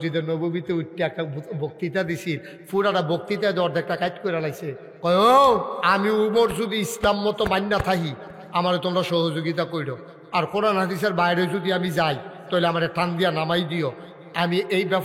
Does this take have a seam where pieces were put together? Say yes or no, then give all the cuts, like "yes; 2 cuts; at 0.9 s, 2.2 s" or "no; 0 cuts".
yes; 1 cut; at 5.8 s